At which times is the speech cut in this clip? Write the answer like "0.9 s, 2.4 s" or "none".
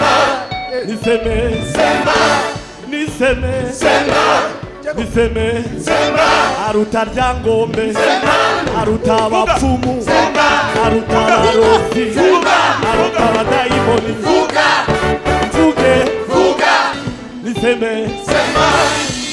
17.0 s